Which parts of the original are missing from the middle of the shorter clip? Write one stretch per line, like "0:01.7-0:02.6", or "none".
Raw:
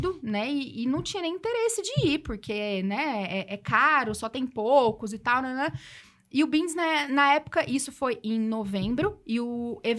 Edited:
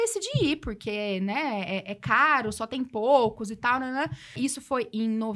0:06.0-0:07.7